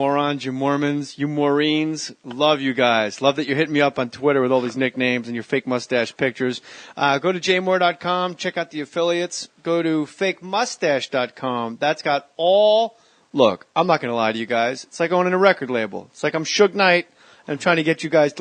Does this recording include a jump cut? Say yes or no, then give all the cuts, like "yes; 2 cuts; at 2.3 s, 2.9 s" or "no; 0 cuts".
yes; 1 cut; at 7.8 s